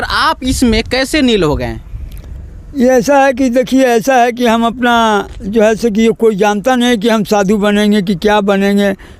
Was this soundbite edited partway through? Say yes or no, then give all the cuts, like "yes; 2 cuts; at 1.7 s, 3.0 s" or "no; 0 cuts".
no; 0 cuts